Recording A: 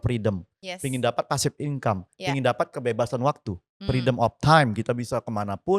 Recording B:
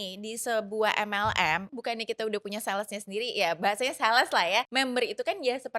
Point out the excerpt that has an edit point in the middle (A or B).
B